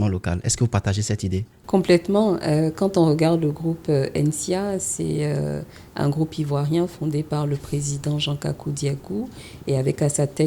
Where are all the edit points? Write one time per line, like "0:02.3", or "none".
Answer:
0:01.5